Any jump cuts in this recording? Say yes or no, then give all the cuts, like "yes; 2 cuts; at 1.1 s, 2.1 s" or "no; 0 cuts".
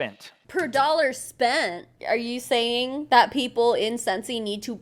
yes; 1 cut; at 1.9 s